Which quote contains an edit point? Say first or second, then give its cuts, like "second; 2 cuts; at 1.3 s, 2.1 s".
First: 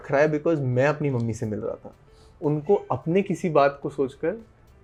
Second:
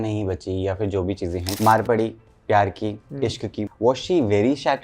second; 2 cuts; at 1.5 s, 3.7 s